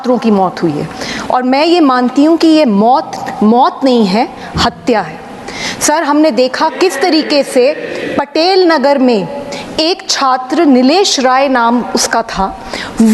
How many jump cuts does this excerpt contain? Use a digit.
0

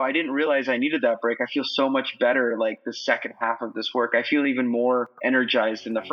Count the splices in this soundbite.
0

